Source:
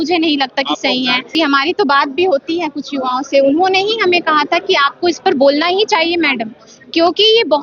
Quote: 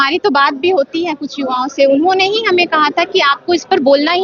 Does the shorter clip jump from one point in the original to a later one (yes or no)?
no